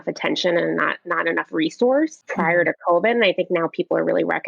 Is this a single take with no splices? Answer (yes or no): no